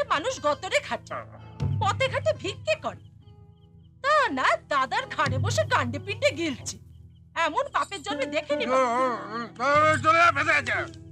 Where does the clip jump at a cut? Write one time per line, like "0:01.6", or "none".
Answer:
none